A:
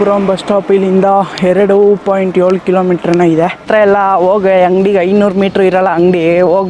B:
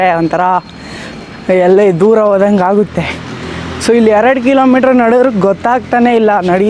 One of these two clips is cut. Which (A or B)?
A